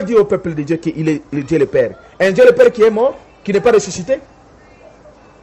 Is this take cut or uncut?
uncut